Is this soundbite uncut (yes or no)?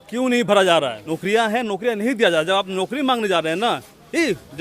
no